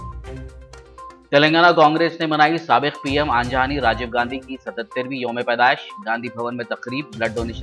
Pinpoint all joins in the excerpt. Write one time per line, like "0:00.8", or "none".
none